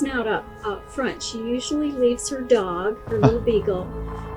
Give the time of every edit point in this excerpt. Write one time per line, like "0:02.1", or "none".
none